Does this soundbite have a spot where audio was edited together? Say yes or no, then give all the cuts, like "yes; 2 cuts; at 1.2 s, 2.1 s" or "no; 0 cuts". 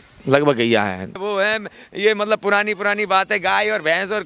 yes; 1 cut; at 1.4 s